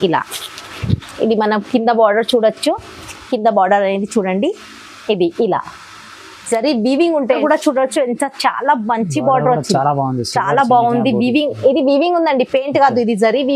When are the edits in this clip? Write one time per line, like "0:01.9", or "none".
0:07.4